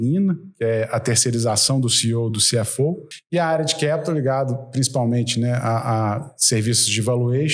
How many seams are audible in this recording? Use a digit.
1